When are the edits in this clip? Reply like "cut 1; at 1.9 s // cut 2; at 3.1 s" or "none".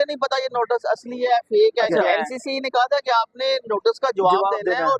cut 1; at 2.3 s